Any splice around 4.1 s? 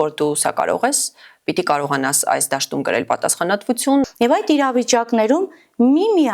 yes; 1 cut; at 4.1 s

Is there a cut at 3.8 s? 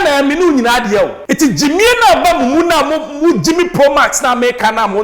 no; 1 cut; at 1.2 s

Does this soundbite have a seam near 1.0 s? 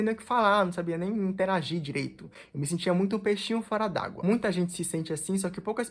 no; 1 cut; at 4.2 s

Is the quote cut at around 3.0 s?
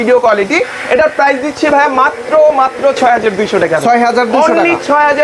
no; 0 cuts

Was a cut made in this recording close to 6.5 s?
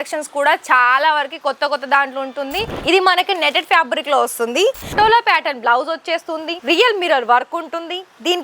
yes; 3 cuts; at 2.7 s, 4.9 s, 6.5 s

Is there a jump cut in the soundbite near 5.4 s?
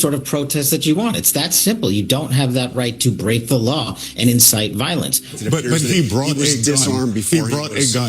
yes; 1 cut; at 5.4 s

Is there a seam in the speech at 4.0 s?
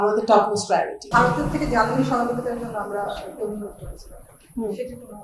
no; 1 cut; at 1.0 s

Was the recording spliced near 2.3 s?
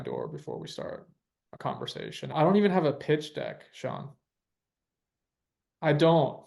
yes; 1 cut; at 2.3 s

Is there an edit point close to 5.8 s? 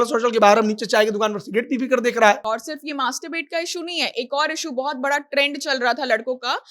no; 1 cut; at 2.4 s

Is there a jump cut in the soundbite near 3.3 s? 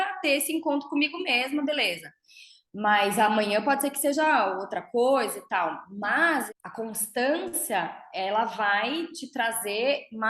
no; 1 cut; at 6.5 s

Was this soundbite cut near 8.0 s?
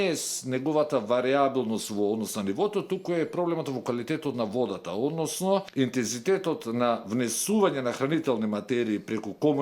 no; 1 cut; at 5.7 s

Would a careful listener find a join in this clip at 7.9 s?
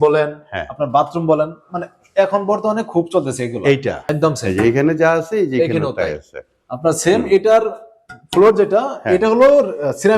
no; 1 cut; at 4.0 s

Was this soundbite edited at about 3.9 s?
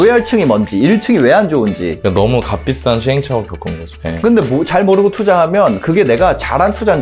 yes; 1 cut; at 3.9 s

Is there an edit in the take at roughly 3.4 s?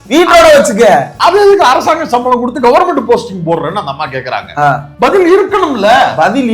no; 1 cut; at 4.9 s

